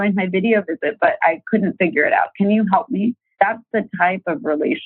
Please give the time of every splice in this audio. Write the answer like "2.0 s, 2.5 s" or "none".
3.2 s